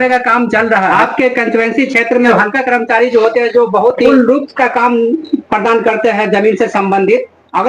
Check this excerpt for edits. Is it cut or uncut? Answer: cut